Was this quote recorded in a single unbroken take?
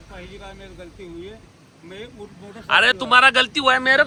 yes; 0 cuts

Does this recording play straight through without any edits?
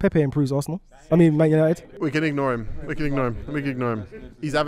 no; 1 cut; at 1.8 s

